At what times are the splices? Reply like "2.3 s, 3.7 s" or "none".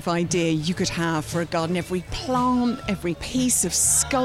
3.2 s